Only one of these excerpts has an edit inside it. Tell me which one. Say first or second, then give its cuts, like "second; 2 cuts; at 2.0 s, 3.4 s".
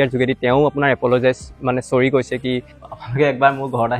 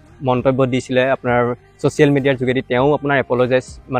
first; 1 cut; at 2.9 s